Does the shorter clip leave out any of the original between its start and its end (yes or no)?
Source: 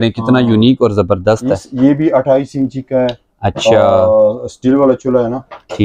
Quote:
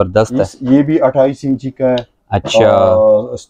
no